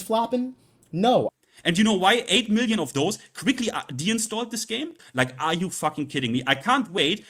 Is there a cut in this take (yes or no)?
yes